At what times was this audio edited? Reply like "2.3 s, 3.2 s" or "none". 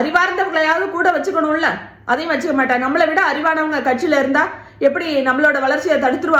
none